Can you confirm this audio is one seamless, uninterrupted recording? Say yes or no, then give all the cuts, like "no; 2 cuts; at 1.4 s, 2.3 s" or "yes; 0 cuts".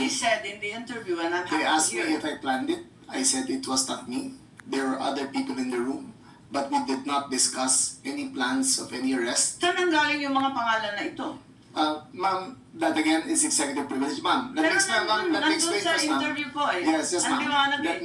no; 1 cut; at 3.7 s